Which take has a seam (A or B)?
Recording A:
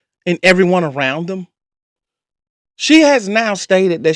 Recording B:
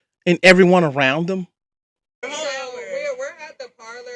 B